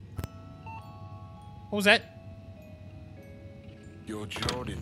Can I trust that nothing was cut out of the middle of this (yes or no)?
yes